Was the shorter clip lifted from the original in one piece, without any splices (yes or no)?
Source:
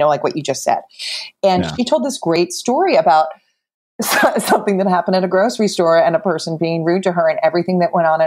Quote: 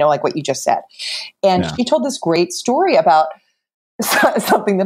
yes